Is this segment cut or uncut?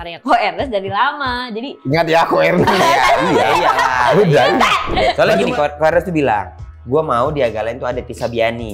cut